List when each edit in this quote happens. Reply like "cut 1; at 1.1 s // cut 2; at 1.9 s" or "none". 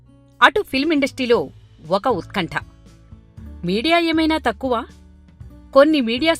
cut 1; at 2.7 s